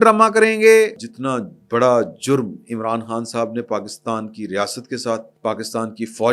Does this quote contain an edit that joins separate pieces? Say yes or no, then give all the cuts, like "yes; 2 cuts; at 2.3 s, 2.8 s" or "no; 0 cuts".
yes; 2 cuts; at 1.0 s, 5.3 s